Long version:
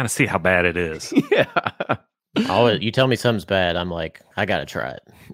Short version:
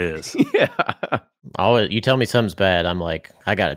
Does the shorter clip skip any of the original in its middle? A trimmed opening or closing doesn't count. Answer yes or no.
yes